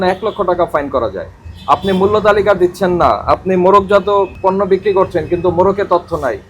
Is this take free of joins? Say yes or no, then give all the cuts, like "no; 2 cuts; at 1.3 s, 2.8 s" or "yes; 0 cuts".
no; 1 cut; at 4.3 s